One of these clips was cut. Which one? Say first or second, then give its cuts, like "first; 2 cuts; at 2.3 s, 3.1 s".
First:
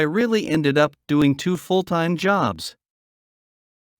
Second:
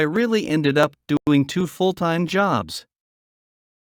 first; 1 cut; at 1.2 s